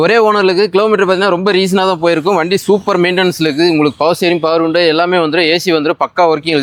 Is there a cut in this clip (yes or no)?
no